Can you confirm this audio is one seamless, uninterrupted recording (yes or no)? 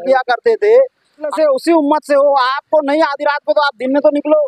no